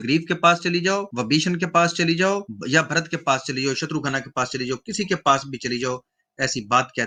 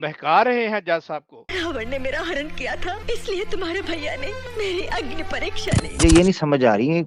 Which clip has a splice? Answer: second; 2 cuts; at 1.4 s, 6.0 s

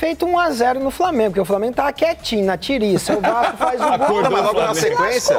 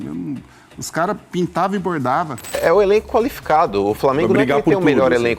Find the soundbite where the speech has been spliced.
second; 1 cut; at 2.6 s

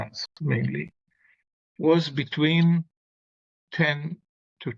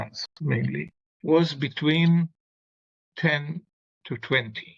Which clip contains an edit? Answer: second; 1 cut; at 1.0 s

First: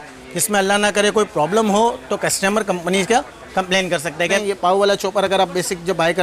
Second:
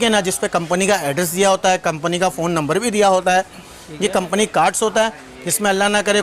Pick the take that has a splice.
first; 1 cut; at 4.4 s

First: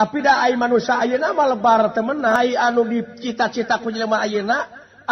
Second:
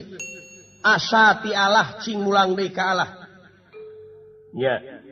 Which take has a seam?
first; 1 cut; at 2.4 s

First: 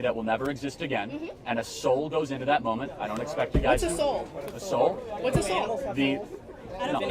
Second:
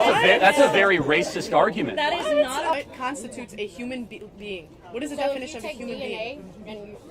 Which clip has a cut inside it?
second; 1 cut; at 2.7 s

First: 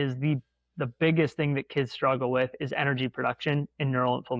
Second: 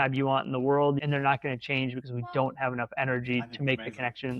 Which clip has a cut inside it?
second; 1 cut; at 1.0 s

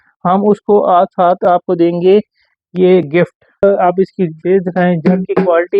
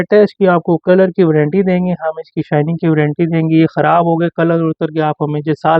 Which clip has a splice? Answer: first; 1 cut; at 3.6 s

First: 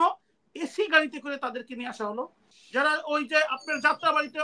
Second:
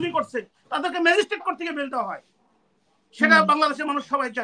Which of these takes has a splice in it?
first; 1 cut; at 2.6 s

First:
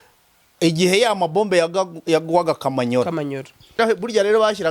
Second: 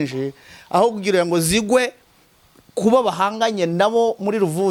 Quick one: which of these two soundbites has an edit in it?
first; 1 cut; at 3.8 s

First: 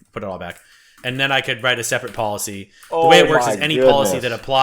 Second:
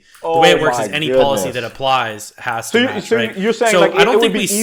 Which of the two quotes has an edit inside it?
first; 1 cut; at 0.9 s

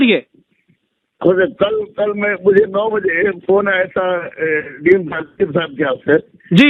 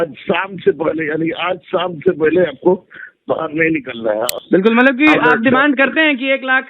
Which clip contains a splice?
second; 1 cut; at 4.4 s

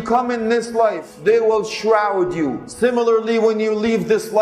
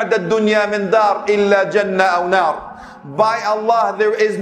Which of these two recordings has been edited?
first; 2 cuts; at 1.1 s, 2.6 s

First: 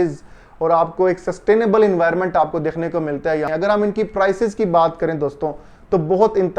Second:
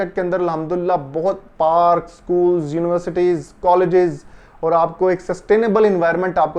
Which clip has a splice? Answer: first; 1 cut; at 3.5 s

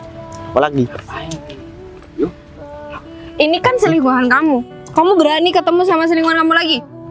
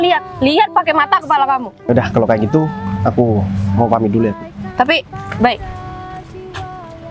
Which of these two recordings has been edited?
second; 1 cut; at 1.9 s

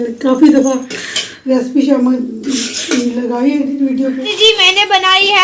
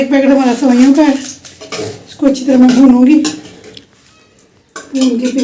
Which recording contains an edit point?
first; 1 cut; at 4.3 s

